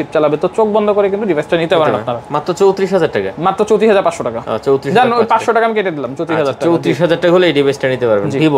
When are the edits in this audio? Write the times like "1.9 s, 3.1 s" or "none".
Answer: none